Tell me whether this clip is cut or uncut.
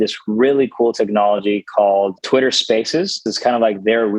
cut